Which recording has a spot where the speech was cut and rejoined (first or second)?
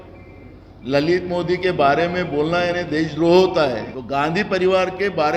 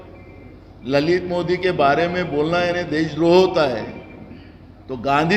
first